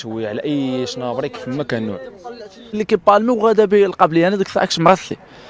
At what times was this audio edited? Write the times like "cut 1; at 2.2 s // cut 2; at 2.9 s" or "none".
cut 1; at 2.8 s